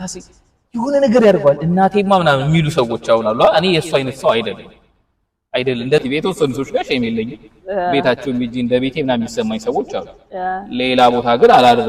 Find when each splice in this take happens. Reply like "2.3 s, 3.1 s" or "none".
6.0 s